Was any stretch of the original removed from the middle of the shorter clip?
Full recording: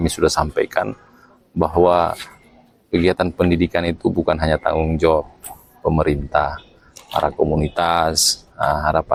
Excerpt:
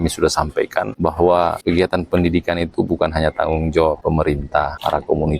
yes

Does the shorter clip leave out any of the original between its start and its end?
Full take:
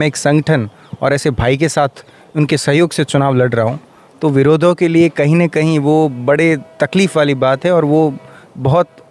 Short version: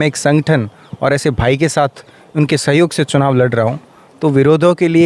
no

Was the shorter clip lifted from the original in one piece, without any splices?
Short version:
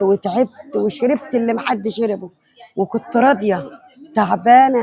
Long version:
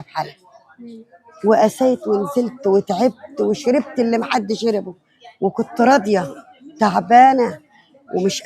yes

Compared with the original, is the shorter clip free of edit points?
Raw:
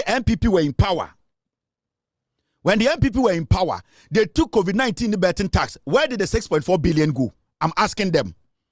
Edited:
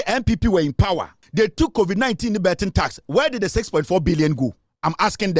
no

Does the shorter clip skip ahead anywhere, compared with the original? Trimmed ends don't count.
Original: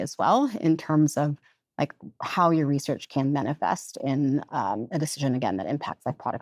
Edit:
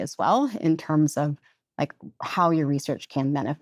no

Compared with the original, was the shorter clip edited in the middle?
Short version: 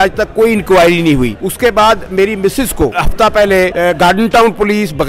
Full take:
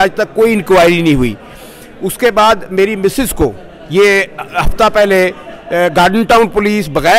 yes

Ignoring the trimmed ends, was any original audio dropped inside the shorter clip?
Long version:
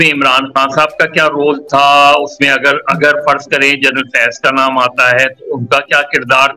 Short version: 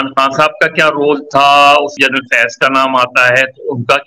yes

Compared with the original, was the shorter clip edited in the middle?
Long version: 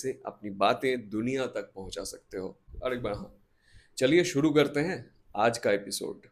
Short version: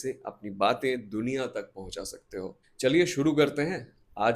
yes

